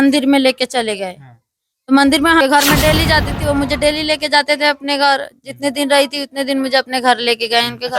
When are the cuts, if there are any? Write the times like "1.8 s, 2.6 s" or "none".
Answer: 2.4 s